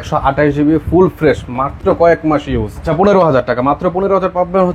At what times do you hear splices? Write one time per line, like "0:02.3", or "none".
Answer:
0:02.8